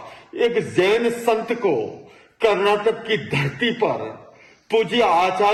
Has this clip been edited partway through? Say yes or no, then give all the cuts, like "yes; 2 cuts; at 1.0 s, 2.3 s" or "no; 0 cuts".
no; 0 cuts